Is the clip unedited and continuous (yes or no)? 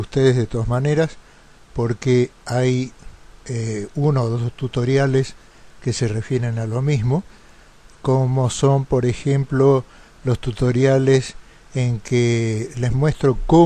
yes